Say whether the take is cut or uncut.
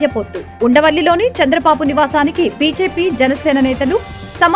uncut